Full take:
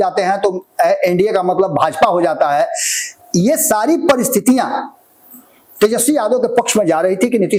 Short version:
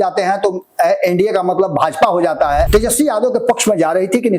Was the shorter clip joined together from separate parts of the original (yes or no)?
yes